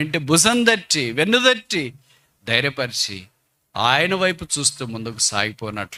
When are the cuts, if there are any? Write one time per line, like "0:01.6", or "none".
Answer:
none